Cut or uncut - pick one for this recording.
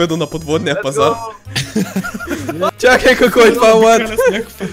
cut